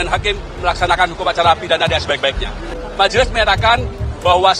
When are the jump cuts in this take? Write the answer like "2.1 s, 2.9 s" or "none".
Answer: 2.8 s

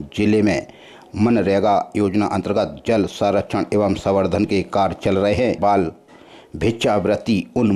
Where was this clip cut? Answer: 5.6 s

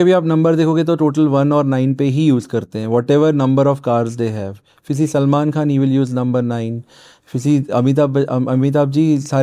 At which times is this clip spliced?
none

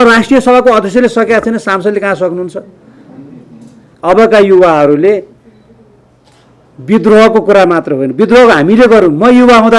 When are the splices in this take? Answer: 3.9 s

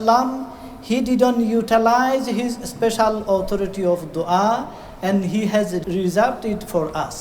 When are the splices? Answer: 5.8 s

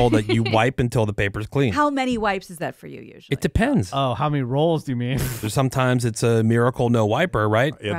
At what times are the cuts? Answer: 1.7 s, 5.4 s

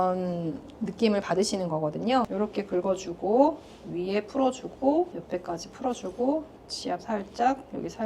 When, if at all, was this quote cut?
2.3 s, 5.2 s

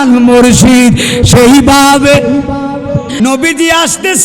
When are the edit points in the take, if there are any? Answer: 3.1 s

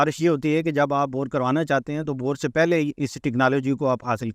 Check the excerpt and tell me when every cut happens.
none

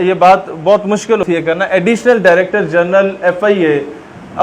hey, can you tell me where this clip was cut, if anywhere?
1.2 s

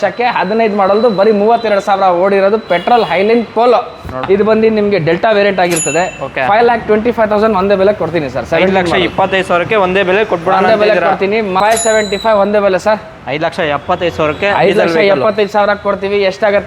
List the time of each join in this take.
4.1 s, 11.6 s

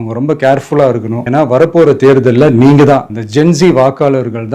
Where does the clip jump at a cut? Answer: 1.2 s

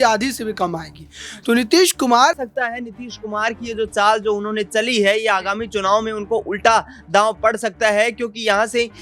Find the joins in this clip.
2.4 s

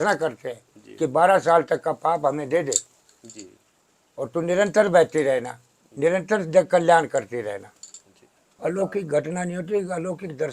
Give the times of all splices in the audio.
8.5 s

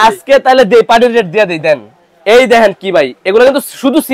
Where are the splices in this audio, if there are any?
none

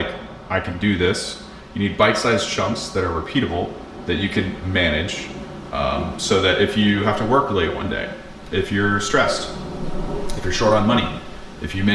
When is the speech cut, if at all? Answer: none

